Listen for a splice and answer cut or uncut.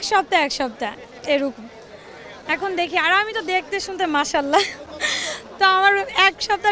uncut